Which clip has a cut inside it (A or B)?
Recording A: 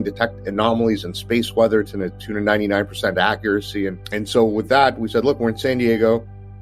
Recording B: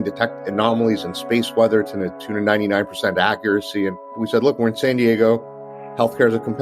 B